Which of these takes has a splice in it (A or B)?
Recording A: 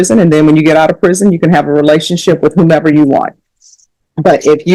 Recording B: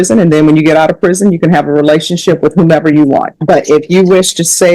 B